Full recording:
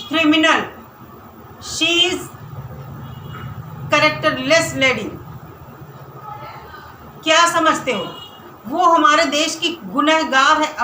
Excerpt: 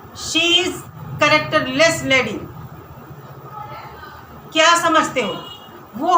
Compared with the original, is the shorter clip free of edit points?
no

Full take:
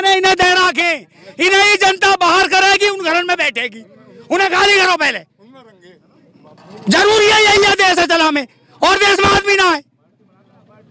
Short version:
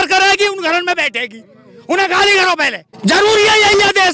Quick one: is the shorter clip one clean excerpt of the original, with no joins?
no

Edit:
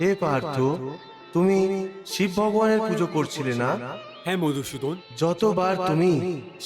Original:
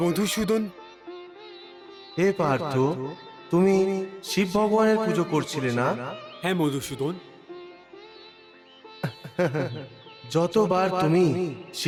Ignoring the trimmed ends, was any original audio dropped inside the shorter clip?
yes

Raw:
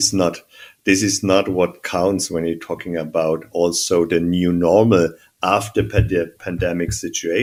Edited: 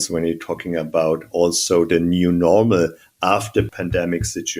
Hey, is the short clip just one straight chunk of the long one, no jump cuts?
no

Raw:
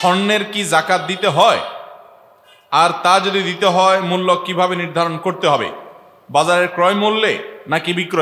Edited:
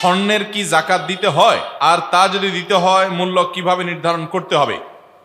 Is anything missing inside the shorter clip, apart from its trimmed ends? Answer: yes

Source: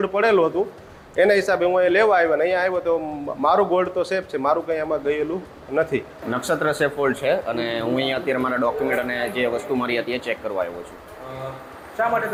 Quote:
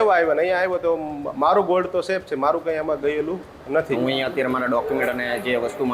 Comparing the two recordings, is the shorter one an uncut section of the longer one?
no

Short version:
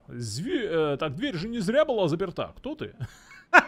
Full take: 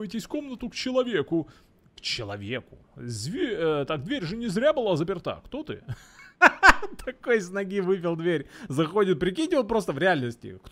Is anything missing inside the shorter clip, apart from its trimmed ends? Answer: no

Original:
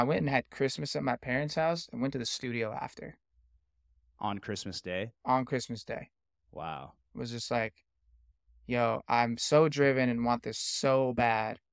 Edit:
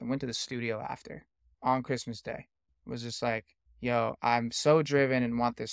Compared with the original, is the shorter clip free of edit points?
no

